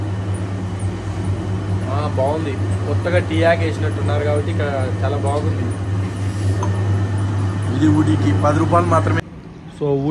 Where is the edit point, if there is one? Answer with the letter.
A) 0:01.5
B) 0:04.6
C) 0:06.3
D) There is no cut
D